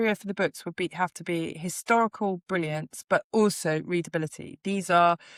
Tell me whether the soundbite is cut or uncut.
uncut